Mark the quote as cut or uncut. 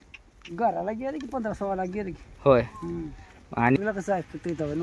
cut